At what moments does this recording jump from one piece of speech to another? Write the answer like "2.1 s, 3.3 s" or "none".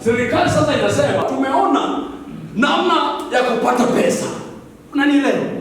1.2 s